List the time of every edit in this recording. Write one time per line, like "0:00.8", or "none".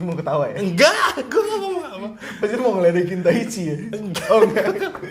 none